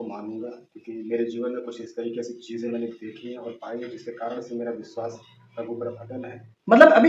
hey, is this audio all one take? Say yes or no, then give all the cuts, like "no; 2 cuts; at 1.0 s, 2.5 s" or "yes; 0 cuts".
yes; 0 cuts